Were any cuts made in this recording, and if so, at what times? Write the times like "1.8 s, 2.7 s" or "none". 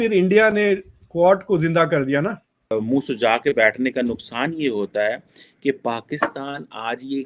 2.5 s

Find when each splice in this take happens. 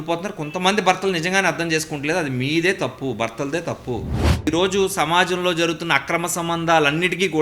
4.5 s

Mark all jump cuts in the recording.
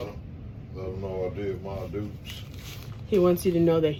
none

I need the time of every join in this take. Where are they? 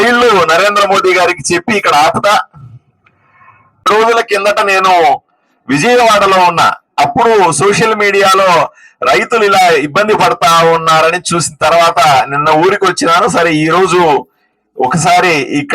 3.8 s

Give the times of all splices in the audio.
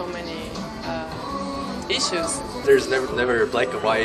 2.6 s

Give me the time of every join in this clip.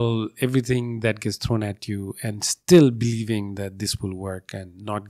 none

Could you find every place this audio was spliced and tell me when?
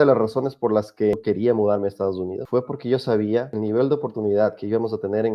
1.1 s, 2.4 s, 3.5 s

